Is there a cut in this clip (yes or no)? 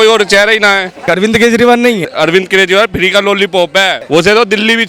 yes